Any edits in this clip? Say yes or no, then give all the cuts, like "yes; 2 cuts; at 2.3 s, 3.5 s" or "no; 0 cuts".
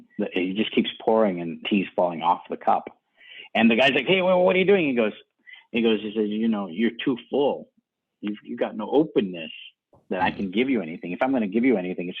no; 0 cuts